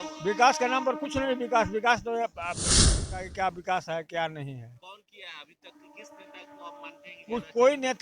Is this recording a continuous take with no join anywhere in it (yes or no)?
no